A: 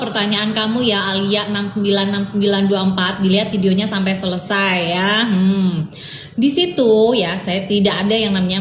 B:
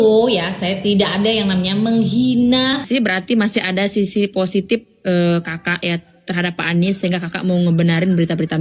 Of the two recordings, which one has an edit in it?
B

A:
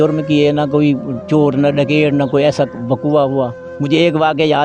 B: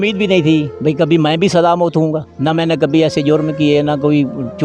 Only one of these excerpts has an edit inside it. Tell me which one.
A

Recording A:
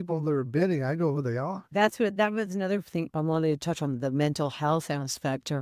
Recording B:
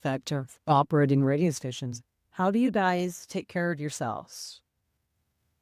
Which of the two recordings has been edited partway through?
A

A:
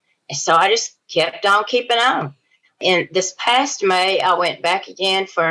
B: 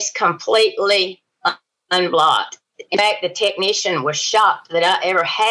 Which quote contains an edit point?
A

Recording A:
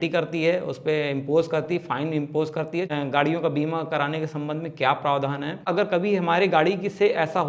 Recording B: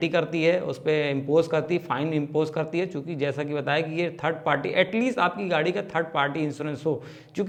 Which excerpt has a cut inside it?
A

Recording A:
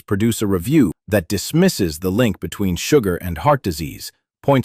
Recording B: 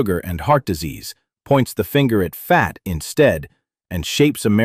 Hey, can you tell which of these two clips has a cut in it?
A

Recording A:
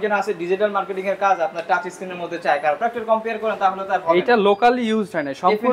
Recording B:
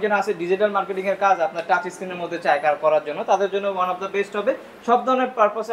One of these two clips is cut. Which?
A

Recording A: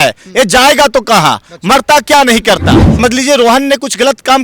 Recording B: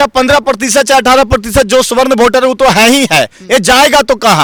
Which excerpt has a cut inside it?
A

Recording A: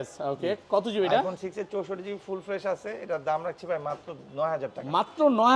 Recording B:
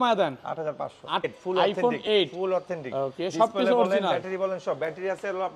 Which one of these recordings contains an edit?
B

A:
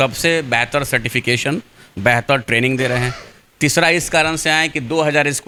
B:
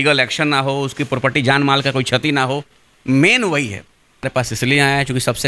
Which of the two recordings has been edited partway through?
B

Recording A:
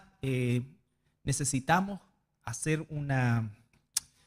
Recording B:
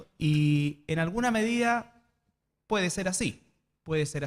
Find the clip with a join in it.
B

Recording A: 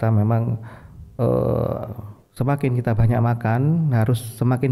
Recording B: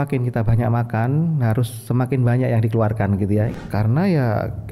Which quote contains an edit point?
B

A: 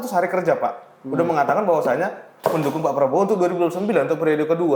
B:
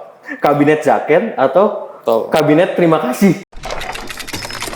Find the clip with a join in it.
B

